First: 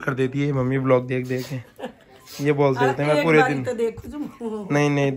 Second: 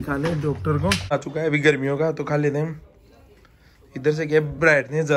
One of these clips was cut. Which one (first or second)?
second